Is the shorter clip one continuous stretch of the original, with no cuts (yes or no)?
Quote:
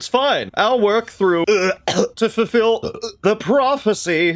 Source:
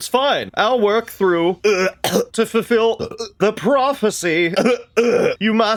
no